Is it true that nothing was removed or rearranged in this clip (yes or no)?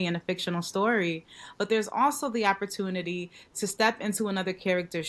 yes